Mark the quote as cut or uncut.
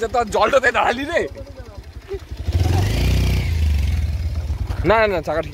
uncut